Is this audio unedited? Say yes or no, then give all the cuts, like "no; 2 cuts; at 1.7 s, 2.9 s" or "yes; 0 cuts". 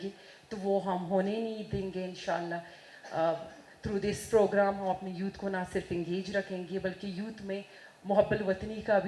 yes; 0 cuts